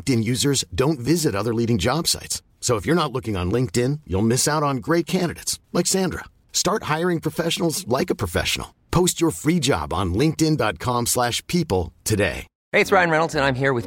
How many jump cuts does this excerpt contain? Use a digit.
1